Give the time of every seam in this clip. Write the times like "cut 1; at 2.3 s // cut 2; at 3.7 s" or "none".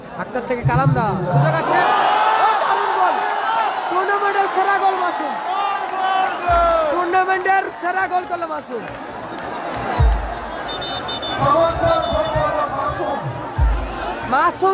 none